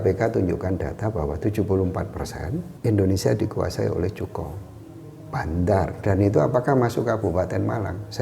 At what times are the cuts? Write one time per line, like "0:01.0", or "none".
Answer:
0:02.7
0:06.0